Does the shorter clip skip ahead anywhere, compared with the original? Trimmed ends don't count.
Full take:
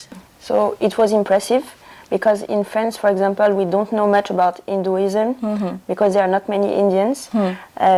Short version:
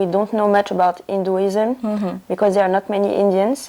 no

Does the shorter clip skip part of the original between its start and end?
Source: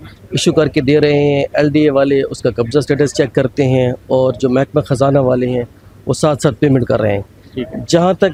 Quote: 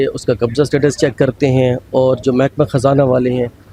no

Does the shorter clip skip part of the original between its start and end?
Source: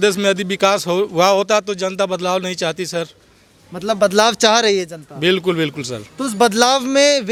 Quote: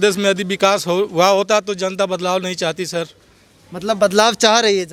no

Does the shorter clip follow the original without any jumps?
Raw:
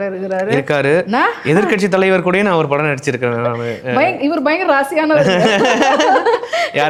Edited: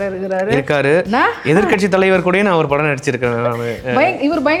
yes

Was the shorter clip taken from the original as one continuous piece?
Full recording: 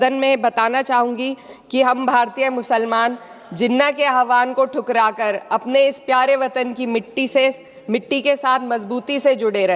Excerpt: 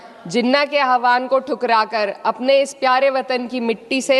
yes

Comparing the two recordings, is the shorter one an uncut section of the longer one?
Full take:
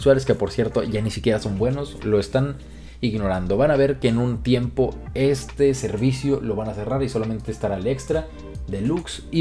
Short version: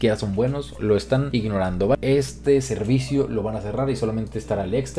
no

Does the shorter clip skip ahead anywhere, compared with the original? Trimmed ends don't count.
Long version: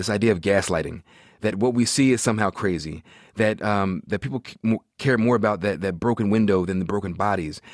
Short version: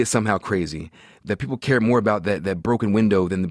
yes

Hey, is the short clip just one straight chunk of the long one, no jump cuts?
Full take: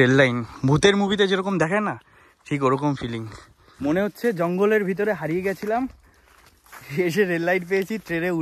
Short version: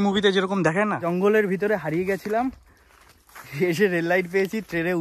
no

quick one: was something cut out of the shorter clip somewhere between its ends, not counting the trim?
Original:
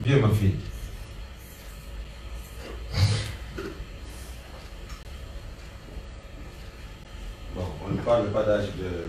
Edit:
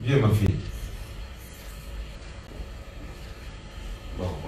yes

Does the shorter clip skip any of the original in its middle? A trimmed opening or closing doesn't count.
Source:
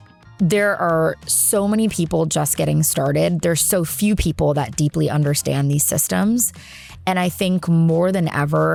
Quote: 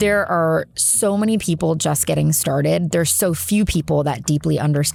no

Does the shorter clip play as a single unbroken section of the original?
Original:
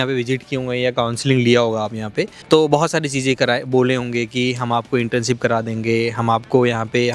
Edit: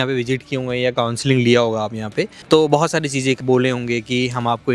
no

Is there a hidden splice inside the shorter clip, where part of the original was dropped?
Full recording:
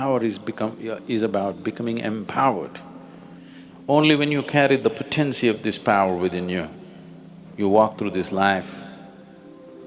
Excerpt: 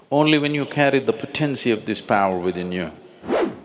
no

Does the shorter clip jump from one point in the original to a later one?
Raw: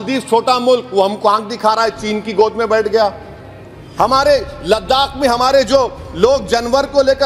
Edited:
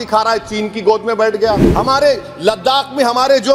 yes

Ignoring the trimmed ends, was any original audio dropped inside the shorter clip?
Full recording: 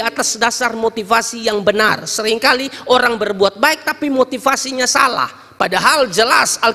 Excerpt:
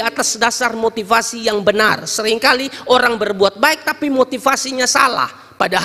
no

